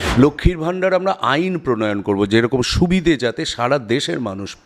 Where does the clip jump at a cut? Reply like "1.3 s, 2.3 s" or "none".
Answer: none